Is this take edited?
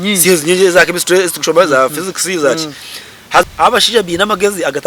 yes; 1 cut; at 3.4 s

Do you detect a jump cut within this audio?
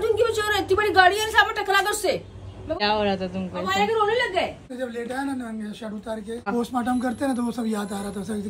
yes; 3 cuts; at 2.8 s, 4.6 s, 6.5 s

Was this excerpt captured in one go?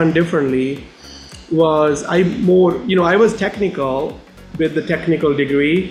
yes; 0 cuts

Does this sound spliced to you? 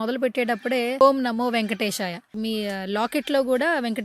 yes; 1 cut; at 1.0 s

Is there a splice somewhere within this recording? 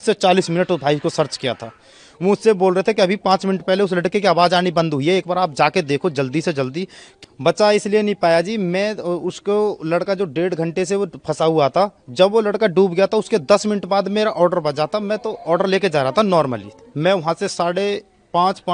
yes; 2 cuts; at 7.0 s, 16.8 s

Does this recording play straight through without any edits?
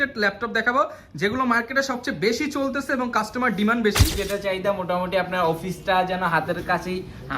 no; 1 cut; at 4.1 s

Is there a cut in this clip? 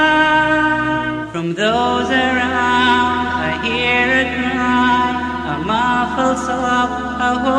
yes; 1 cut; at 1.1 s

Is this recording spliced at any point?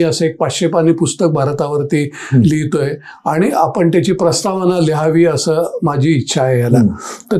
no; 0 cuts

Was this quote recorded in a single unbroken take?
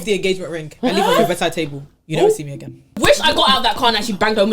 no; 1 cut; at 3.0 s

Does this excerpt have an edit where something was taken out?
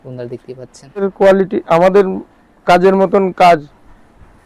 yes; 1 cut; at 1.0 s

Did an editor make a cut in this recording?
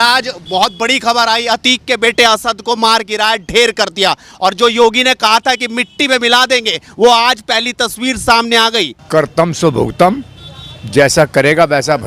yes; 1 cut; at 9.0 s

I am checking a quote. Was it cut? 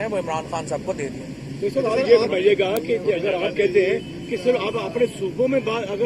no; 0 cuts

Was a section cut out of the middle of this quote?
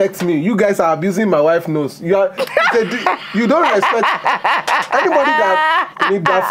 no; 0 cuts

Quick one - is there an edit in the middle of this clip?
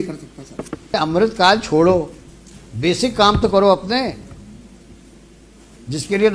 yes; 1 cut; at 1.0 s

